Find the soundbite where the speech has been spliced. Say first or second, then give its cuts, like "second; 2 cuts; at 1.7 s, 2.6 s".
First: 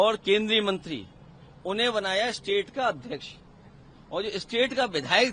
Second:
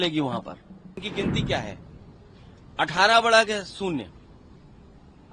second; 1 cut; at 1.0 s